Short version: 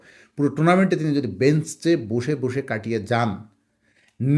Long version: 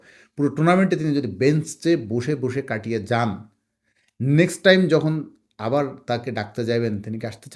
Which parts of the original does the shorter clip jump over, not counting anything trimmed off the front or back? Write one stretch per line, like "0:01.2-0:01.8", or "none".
none